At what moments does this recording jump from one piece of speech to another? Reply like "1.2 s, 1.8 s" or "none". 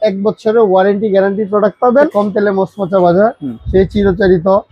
2.1 s